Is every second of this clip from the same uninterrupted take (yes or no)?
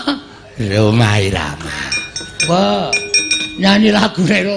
no